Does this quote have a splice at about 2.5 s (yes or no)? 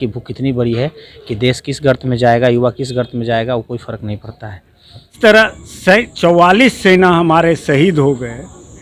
no